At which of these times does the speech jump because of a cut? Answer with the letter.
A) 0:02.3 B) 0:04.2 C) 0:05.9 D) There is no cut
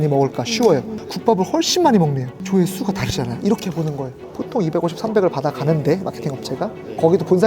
B